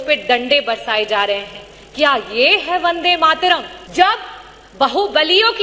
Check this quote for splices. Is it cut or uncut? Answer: cut